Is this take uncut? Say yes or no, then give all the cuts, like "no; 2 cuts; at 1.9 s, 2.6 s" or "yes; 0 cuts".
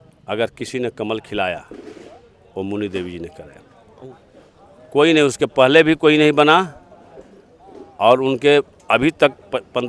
yes; 0 cuts